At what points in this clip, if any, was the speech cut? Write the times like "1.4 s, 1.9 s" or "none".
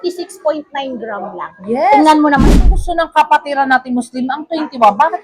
2.5 s